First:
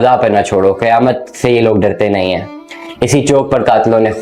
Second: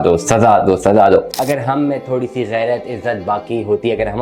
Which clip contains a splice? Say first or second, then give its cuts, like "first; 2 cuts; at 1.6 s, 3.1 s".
second; 1 cut; at 1.3 s